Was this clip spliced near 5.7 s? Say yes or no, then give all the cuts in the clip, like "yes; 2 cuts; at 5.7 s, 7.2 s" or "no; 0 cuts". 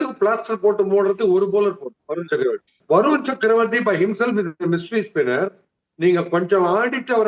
no; 1 cut; at 2.7 s